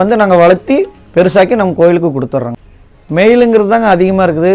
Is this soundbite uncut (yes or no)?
no